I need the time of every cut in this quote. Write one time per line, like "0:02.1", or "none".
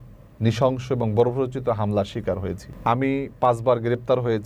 0:02.7